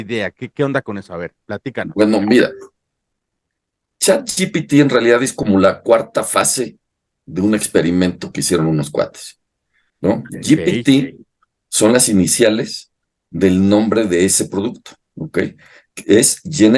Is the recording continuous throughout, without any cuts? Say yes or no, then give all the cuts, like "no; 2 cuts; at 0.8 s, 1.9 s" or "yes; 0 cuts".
yes; 0 cuts